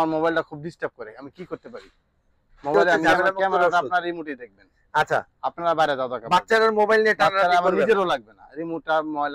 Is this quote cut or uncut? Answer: cut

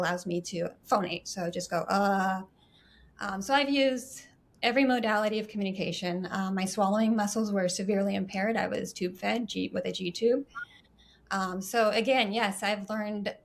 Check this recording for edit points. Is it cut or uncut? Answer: uncut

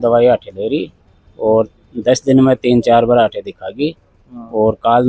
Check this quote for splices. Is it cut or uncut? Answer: uncut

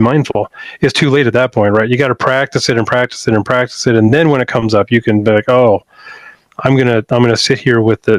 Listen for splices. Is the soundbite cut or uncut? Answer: uncut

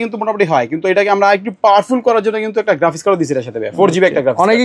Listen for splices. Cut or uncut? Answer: uncut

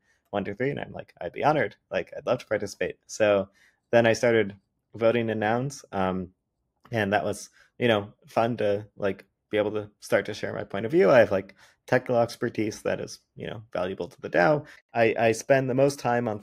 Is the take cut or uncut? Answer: cut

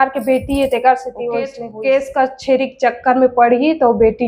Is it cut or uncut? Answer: cut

